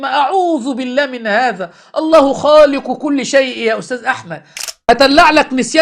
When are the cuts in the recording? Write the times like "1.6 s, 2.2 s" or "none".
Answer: 4.7 s